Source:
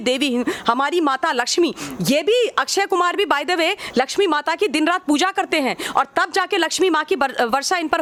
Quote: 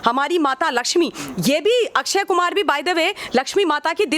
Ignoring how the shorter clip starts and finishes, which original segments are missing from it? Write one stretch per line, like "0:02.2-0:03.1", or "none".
none